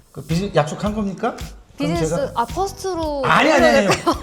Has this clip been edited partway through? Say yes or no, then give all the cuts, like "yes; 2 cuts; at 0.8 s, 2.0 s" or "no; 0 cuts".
no; 0 cuts